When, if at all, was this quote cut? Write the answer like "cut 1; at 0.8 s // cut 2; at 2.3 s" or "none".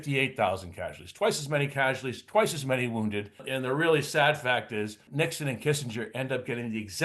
cut 1; at 3.4 s // cut 2; at 5.0 s